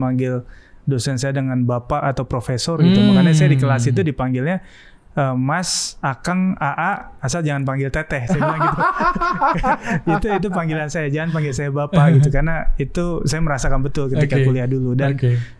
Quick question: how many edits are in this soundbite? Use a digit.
0